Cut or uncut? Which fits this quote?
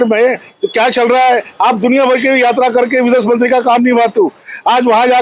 uncut